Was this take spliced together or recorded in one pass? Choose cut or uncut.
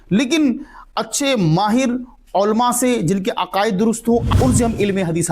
cut